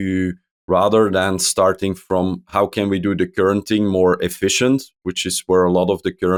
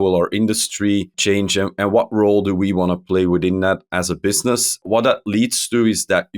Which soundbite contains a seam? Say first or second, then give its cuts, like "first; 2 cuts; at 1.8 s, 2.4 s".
second; 2 cuts; at 1.1 s, 4.8 s